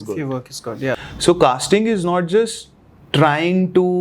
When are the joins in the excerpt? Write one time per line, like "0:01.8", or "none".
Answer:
0:01.0